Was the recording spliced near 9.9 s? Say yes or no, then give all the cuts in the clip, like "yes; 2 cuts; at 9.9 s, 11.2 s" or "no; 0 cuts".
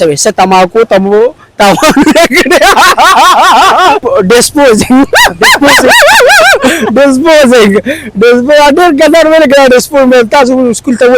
no; 1 cut; at 4.0 s